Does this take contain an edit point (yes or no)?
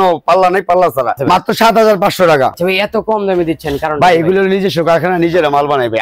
yes